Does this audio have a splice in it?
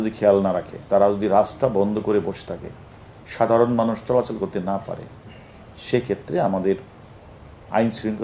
no; 0 cuts

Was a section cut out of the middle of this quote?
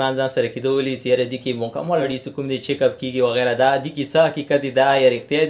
yes; 1 cut; at 2.1 s

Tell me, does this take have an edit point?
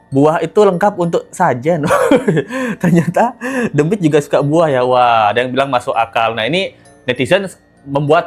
no; 0 cuts

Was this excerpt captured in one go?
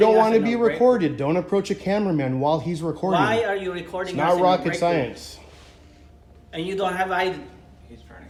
yes; 0 cuts

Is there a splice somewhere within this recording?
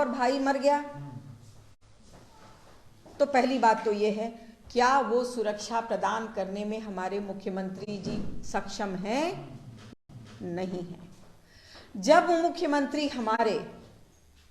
no; 0 cuts

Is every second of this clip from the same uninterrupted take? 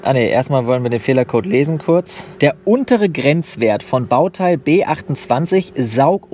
yes; 0 cuts

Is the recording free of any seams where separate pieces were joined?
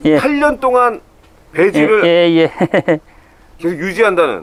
yes; 0 cuts

